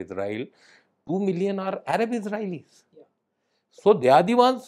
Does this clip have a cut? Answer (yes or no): no